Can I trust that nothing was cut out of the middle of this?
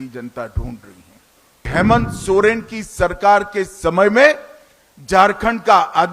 no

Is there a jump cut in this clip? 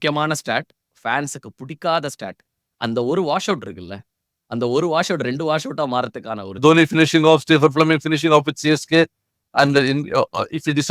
yes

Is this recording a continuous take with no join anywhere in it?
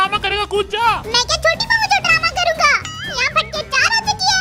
yes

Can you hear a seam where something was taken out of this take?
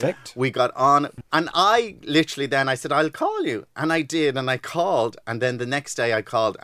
yes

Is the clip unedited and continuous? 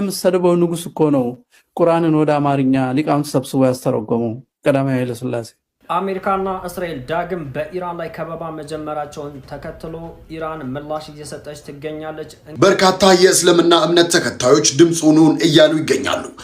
no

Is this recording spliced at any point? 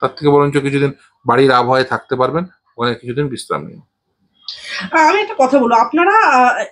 no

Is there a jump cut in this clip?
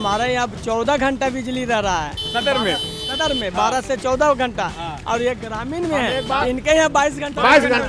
no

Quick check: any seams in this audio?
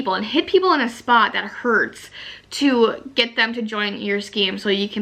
no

